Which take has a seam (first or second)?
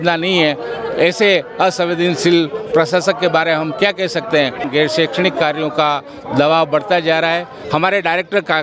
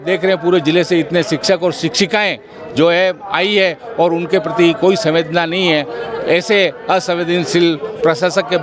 first